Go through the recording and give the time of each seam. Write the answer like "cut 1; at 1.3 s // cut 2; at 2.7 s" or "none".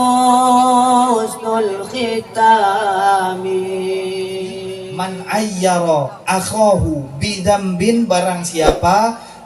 cut 1; at 4.8 s